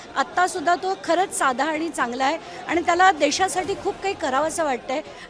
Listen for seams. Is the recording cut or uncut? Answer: uncut